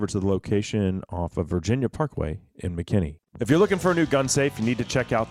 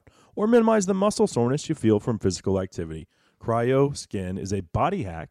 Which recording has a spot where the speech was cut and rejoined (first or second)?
first